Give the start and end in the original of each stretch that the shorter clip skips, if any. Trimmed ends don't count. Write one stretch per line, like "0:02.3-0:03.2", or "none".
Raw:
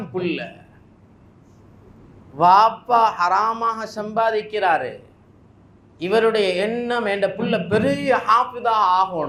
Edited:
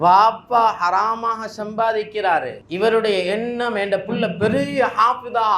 0:05.0-0:05.9